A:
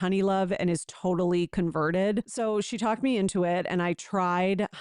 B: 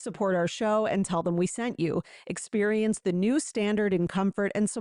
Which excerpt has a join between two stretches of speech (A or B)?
A